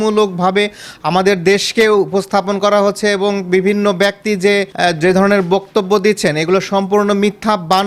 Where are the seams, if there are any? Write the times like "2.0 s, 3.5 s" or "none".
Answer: none